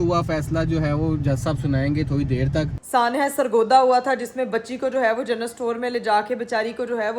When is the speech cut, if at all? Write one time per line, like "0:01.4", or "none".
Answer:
0:02.8